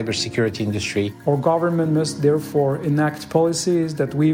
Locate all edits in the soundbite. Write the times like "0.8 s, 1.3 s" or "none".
1.1 s